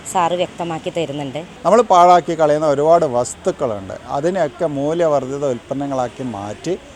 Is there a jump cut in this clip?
yes; 1 cut; at 1.4 s

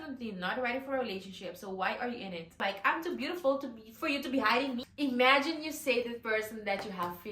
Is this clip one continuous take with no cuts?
no; 2 cuts; at 2.6 s, 4.9 s

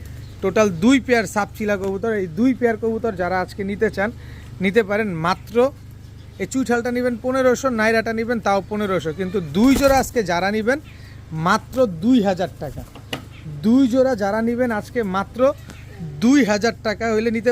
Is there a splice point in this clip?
no; 0 cuts

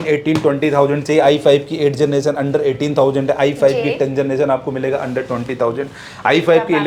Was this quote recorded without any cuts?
yes; 0 cuts

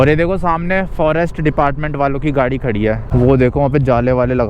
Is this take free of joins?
no; 1 cut; at 3.0 s

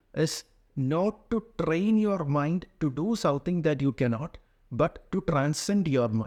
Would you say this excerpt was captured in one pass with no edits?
yes; 0 cuts

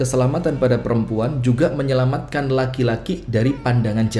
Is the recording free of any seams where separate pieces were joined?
yes; 0 cuts

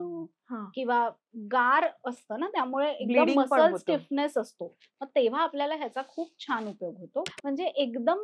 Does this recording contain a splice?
yes; 1 cut; at 7.3 s

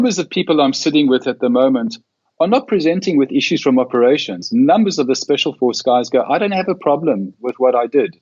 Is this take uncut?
yes; 0 cuts

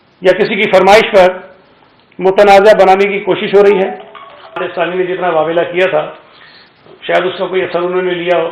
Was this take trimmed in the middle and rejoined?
yes; 1 cut; at 4.7 s

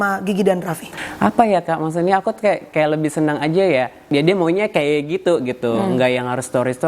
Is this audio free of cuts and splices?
no; 2 cuts; at 1.0 s, 4.1 s

